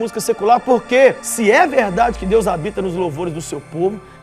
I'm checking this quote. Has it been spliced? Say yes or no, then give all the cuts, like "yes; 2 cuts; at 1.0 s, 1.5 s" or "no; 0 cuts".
yes; 1 cut; at 1.2 s